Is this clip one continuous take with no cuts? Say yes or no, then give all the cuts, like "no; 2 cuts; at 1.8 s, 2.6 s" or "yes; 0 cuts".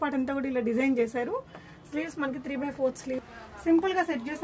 no; 1 cut; at 3.2 s